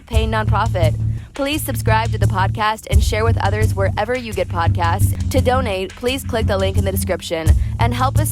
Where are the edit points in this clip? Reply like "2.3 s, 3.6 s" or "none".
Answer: 5.1 s